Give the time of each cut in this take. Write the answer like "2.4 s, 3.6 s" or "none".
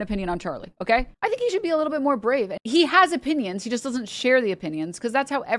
1.1 s, 2.5 s